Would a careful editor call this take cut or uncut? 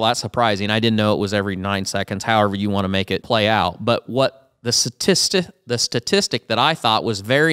cut